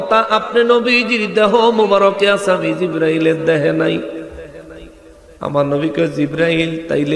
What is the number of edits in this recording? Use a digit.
0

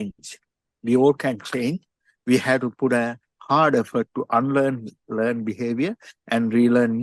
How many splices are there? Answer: 1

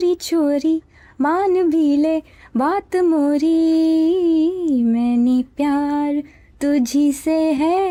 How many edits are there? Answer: 0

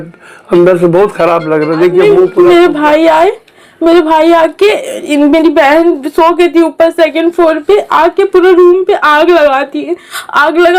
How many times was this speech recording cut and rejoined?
1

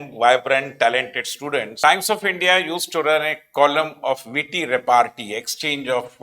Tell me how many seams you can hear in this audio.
1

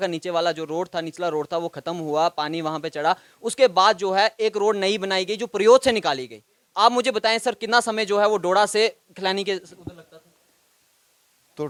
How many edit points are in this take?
0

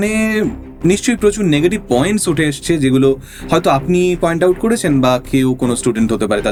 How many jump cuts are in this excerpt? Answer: 0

